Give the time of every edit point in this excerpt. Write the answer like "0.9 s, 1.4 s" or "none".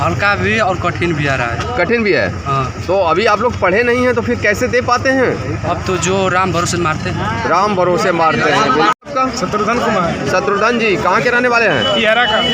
none